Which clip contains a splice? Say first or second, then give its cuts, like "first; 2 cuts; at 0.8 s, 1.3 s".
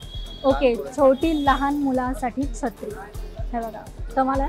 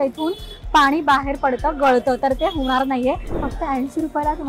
second; 1 cut; at 3.3 s